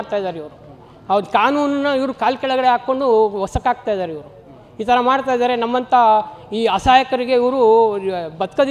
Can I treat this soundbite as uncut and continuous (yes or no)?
yes